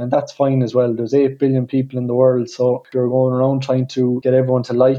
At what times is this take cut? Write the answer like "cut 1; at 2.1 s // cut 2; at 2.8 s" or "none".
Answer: cut 1; at 2.9 s // cut 2; at 4.2 s